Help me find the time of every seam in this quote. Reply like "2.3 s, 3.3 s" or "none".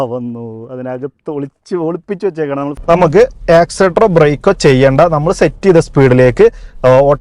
2.8 s

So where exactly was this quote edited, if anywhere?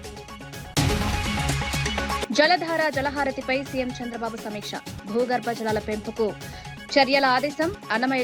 0.7 s, 2.2 s

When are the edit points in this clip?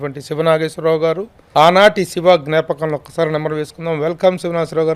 1.3 s

